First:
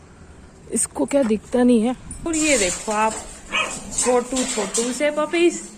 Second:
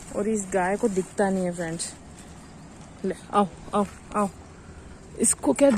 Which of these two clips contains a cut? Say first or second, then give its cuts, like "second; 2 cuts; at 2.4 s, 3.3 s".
first; 1 cut; at 2.3 s